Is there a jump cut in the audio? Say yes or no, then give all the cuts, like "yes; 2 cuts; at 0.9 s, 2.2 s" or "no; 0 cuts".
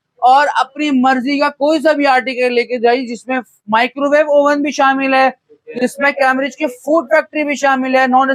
no; 0 cuts